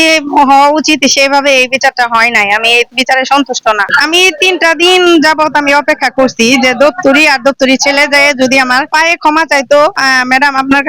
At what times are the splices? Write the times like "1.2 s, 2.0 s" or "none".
3.9 s, 10.0 s